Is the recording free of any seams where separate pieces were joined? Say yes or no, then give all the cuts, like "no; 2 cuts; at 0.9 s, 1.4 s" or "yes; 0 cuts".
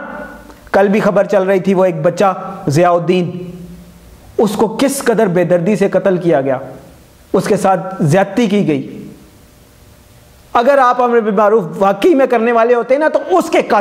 yes; 0 cuts